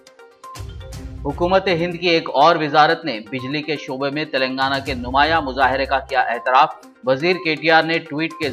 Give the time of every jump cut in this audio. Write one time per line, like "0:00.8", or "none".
0:01.0